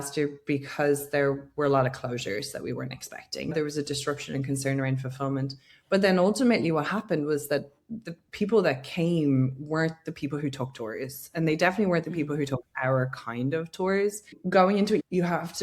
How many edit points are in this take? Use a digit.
1